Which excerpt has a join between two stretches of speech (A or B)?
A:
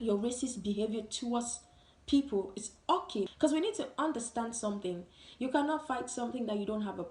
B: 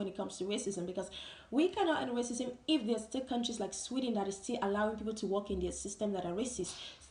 A